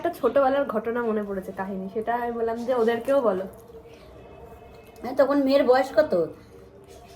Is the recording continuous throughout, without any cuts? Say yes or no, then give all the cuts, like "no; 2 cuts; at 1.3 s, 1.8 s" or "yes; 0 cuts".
yes; 0 cuts